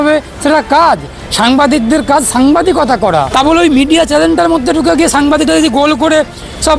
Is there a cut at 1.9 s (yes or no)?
no